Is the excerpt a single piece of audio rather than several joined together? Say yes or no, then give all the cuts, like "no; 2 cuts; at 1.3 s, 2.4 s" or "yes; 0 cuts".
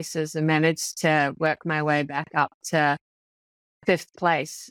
yes; 0 cuts